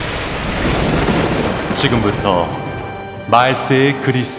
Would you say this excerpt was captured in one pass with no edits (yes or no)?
yes